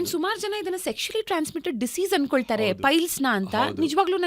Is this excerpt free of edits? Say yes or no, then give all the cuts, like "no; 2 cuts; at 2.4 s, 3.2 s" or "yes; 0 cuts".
yes; 0 cuts